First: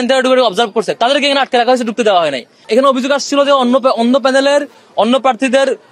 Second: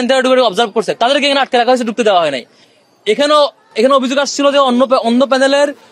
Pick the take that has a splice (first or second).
first